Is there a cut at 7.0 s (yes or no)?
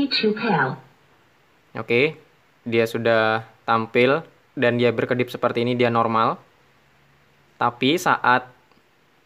no